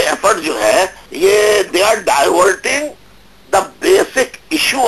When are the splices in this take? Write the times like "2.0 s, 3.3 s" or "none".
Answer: 1.0 s